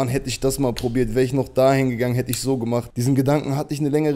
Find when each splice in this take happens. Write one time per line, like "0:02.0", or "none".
0:02.9